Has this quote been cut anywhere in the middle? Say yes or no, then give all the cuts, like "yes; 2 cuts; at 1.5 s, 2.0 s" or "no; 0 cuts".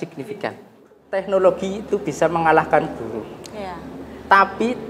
yes; 1 cut; at 1.2 s